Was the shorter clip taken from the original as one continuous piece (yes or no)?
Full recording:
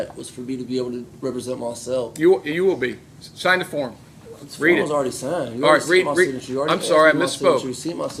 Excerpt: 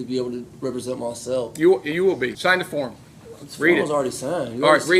no